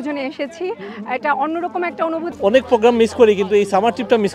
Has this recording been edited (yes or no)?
yes